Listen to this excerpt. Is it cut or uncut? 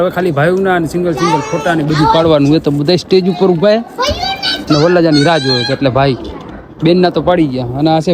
uncut